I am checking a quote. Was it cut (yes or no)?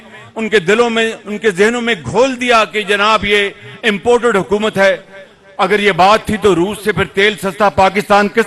no